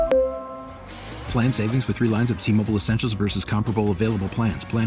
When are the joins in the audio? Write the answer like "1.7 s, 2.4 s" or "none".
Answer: none